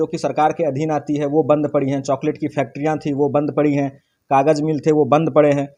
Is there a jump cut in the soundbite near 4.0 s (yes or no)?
no